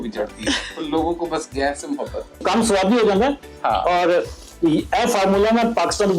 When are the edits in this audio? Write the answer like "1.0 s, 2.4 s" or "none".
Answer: 2.4 s